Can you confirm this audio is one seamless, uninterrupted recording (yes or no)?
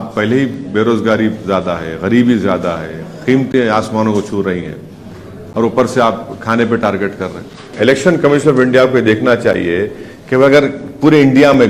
no